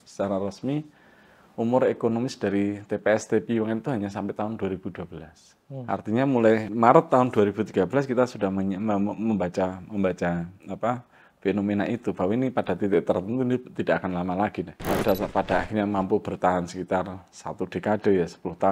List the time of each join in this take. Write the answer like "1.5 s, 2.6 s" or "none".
5.8 s, 6.7 s, 14.8 s